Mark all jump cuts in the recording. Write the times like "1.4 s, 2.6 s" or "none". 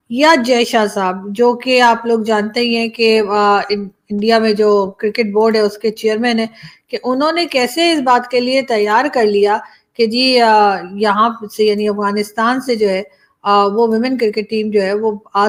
none